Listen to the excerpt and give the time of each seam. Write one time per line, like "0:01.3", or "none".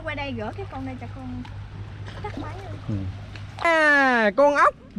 0:03.6